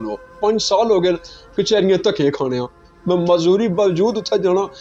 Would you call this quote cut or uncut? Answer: uncut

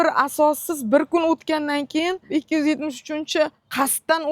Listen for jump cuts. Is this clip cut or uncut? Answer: cut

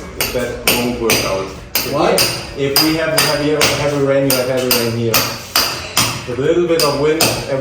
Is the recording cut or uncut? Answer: uncut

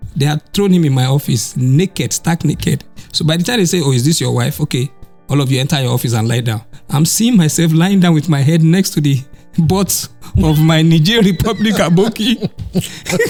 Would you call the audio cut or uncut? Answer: uncut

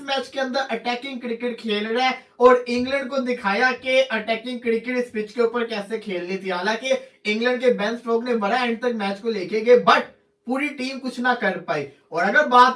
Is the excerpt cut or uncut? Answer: cut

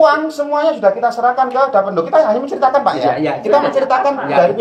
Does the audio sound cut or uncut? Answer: uncut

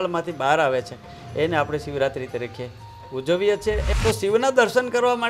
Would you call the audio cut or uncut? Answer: cut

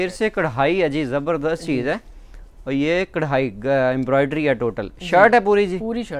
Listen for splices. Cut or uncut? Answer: uncut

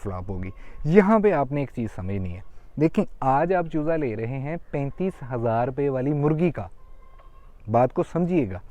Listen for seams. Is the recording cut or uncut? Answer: uncut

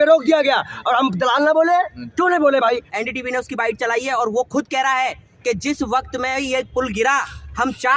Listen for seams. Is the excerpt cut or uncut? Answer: cut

